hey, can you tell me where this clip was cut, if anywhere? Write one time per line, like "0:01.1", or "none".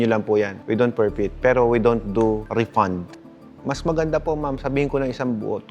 0:03.0

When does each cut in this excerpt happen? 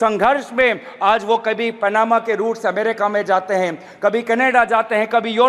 none

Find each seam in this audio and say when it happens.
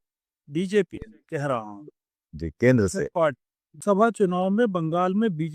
0:03.8

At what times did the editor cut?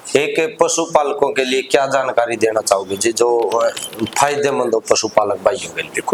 none

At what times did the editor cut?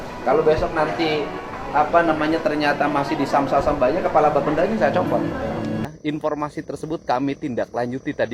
0:05.8

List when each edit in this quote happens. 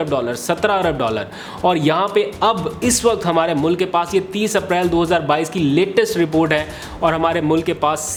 none

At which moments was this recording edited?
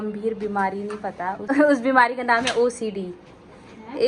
0:01.4

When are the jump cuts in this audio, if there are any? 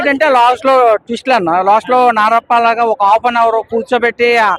none

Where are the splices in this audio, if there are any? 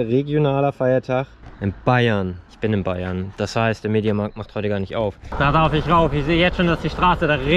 0:01.4
0:02.4
0:05.2

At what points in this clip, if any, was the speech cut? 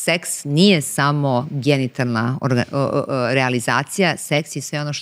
none

